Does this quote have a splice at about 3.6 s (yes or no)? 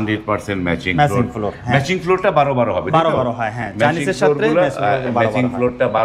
no